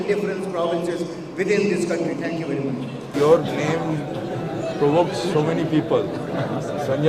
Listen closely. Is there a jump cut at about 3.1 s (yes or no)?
yes